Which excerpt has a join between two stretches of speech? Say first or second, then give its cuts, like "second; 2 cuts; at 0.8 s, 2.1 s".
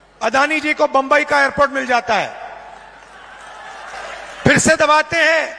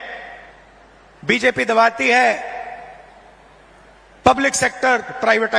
first; 1 cut; at 4.0 s